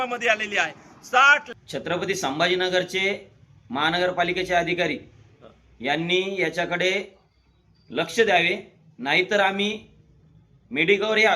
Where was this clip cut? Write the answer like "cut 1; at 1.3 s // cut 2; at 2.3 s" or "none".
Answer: cut 1; at 1.5 s